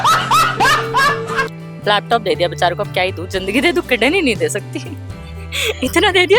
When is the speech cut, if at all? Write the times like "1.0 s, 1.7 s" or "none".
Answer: 1.5 s

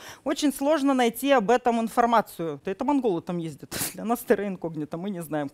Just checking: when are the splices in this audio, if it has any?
2.6 s

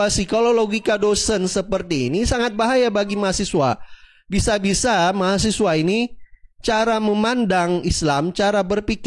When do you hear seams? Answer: none

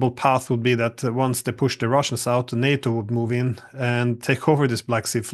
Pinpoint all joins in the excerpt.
none

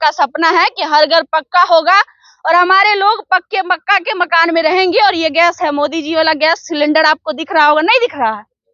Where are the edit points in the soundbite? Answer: none

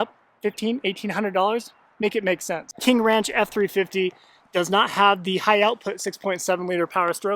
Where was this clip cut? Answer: 2.7 s

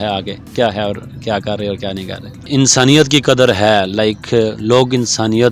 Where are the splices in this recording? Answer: 2.4 s

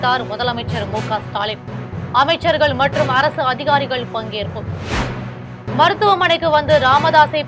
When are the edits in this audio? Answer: none

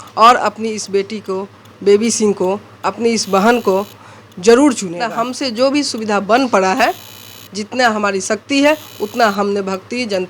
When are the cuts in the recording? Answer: 5.2 s

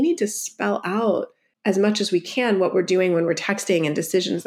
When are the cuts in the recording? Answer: 1.4 s

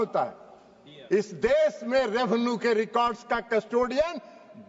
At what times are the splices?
none

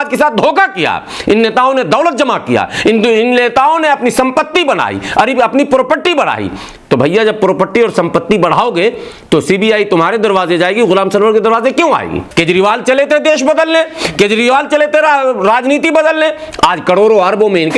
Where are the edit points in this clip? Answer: 12.2 s

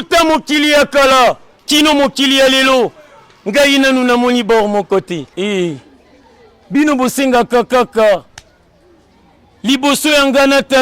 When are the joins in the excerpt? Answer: 5.3 s

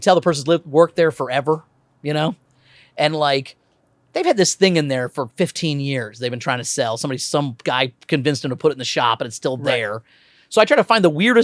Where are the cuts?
none

